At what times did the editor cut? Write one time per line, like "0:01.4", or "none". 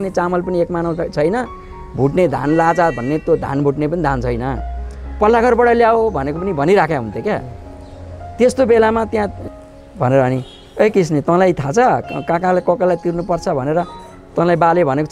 0:09.4